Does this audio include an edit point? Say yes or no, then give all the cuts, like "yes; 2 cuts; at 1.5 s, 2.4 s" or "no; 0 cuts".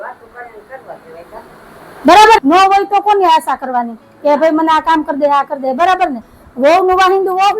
yes; 1 cut; at 2.4 s